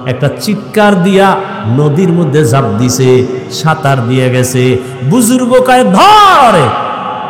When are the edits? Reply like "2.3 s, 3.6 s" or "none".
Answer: none